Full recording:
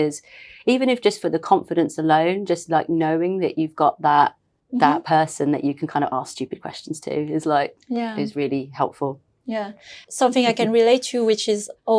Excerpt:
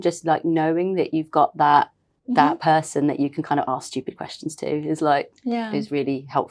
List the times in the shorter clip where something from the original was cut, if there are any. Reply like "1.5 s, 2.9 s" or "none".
none